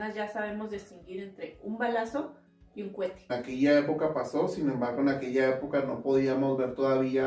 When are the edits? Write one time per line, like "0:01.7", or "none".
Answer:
0:03.2